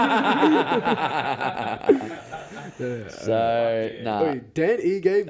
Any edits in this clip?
no; 0 cuts

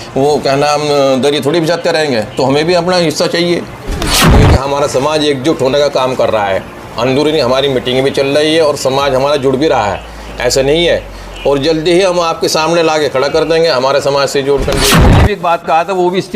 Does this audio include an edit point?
yes; 2 cuts; at 4.3 s, 15.0 s

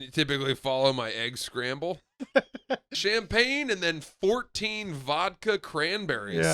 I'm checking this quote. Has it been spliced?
yes; 1 cut; at 2.9 s

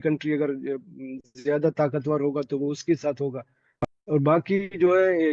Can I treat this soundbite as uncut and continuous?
yes; 0 cuts

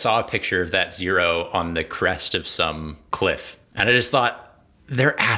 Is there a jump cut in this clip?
yes; 2 cuts; at 3.0 s, 3.6 s

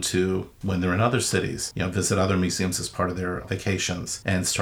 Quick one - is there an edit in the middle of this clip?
no; 0 cuts

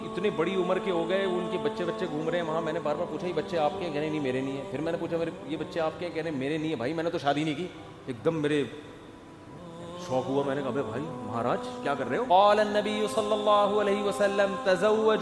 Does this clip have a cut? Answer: yes; 1 cut; at 12.3 s

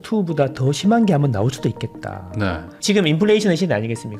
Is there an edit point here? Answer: yes; 1 cut; at 2.8 s

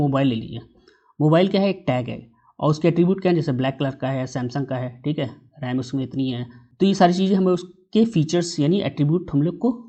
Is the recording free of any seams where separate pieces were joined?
yes; 0 cuts

